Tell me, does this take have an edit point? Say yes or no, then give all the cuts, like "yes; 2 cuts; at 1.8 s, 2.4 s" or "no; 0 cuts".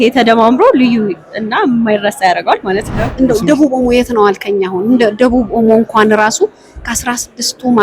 yes; 1 cut; at 3.0 s